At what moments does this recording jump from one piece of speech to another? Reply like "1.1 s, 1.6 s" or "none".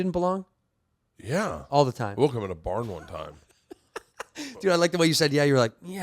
none